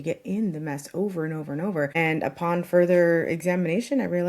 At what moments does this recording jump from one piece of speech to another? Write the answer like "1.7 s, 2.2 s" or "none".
1.9 s